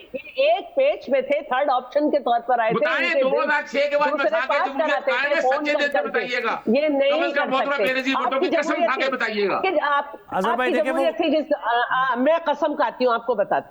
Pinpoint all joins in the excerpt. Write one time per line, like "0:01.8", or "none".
none